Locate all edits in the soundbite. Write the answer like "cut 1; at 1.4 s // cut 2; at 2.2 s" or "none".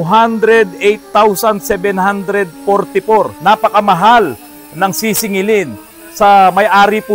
cut 1; at 3.3 s